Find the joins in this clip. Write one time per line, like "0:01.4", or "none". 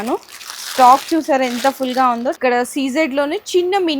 0:02.4